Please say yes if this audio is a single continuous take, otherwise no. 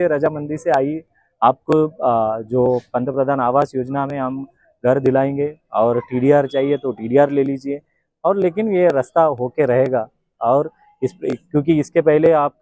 yes